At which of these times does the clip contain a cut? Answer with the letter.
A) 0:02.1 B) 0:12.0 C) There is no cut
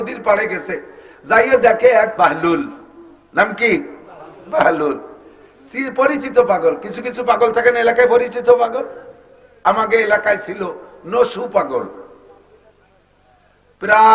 A